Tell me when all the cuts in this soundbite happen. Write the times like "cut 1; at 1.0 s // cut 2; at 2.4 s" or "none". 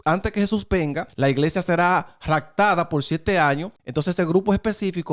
cut 1; at 1.0 s // cut 2; at 3.8 s